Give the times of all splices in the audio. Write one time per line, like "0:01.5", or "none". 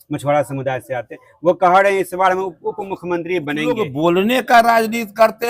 0:03.8